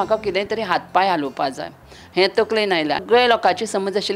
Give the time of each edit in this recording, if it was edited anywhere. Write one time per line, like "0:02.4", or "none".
0:03.0